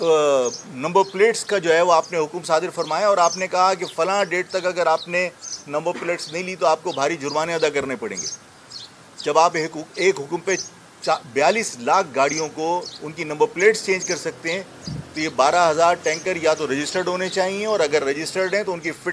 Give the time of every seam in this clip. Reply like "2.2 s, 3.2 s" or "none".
none